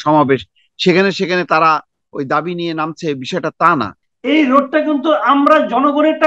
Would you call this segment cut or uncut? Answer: cut